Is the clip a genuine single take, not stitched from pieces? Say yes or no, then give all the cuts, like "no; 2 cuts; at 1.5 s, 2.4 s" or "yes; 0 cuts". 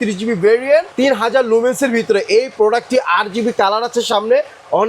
no; 1 cut; at 0.9 s